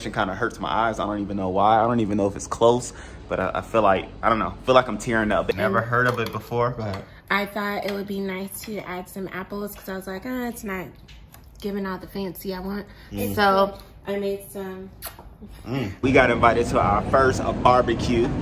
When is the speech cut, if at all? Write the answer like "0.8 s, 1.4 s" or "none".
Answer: 5.5 s, 16.0 s